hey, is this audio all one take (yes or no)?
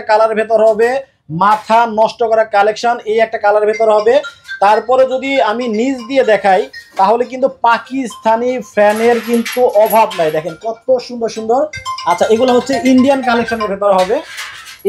yes